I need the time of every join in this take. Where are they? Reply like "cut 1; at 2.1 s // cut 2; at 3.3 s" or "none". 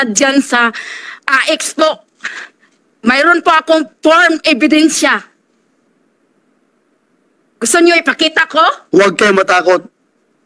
cut 1; at 8.8 s

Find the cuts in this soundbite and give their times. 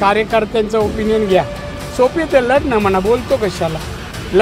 none

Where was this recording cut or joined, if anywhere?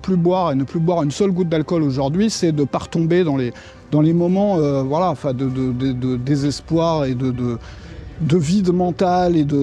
none

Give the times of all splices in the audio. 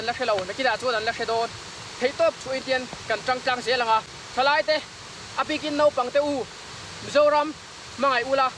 cut 1; at 4.2 s

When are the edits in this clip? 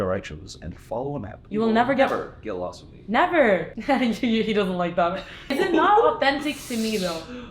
cut 1; at 1.4 s // cut 2; at 3.7 s // cut 3; at 5.5 s

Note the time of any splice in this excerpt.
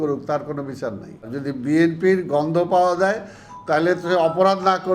cut 1; at 1.3 s

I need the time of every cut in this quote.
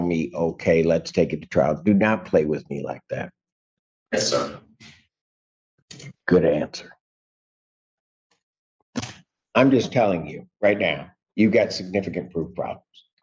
none

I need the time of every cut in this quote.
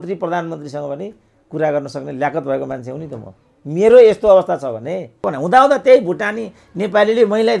cut 1; at 5.3 s

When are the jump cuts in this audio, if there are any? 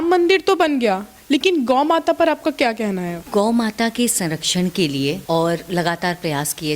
cut 1; at 3.2 s // cut 2; at 5.2 s

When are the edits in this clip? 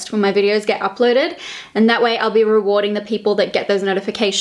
none

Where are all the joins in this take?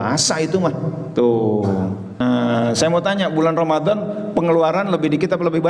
cut 1; at 2.2 s

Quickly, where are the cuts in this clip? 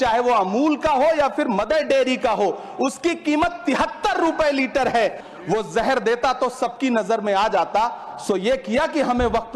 cut 1; at 5.3 s

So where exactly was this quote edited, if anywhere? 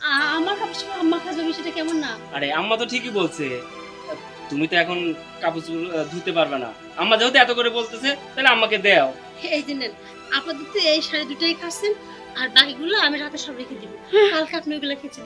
cut 1; at 9.3 s

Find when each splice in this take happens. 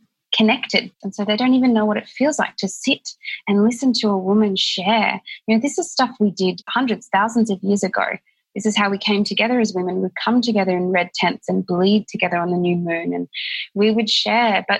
cut 1; at 1.0 s // cut 2; at 6.7 s

